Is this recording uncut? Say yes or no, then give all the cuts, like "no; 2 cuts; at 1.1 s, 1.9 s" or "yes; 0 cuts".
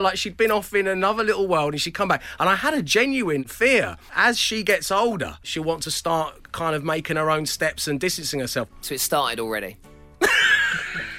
no; 3 cuts; at 3.7 s, 5.5 s, 8.8 s